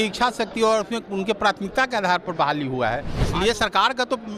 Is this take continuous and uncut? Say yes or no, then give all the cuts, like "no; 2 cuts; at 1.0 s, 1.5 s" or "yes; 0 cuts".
no; 1 cut; at 3.1 s